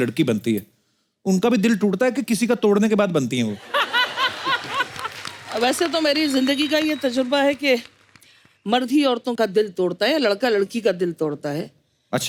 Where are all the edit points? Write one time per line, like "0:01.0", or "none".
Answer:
none